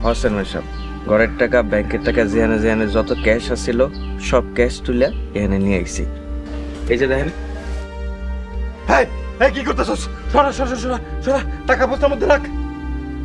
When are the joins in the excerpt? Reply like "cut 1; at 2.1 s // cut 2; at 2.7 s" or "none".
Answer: none